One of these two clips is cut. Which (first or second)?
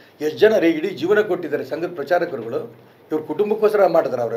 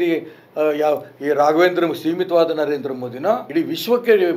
second